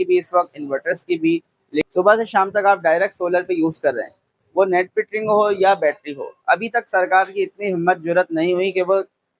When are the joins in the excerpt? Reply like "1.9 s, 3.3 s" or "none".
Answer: 1.9 s